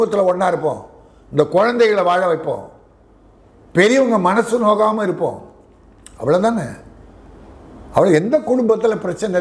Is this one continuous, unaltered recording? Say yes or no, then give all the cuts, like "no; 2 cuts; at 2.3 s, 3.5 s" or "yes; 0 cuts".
yes; 0 cuts